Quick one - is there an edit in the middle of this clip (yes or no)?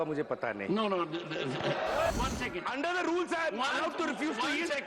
yes